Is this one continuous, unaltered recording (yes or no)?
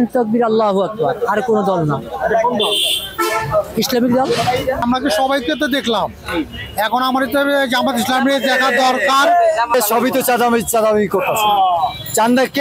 yes